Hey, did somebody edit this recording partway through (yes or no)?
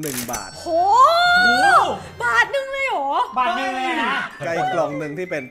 no